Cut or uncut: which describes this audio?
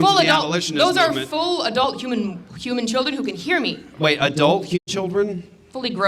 cut